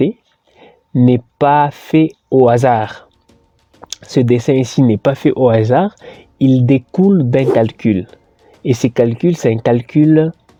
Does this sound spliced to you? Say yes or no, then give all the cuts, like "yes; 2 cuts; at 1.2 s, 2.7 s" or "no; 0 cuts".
no; 0 cuts